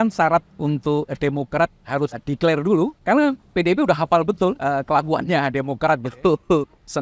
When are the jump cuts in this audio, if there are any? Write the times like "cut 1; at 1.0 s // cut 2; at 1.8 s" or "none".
cut 1; at 2.2 s // cut 2; at 3.0 s // cut 3; at 4.6 s